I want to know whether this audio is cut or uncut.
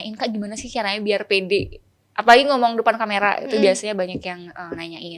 uncut